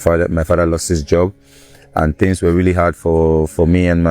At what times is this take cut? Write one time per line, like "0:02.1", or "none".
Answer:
none